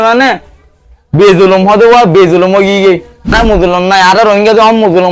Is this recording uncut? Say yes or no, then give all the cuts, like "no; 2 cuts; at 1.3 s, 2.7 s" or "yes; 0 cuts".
no; 1 cut; at 3.3 s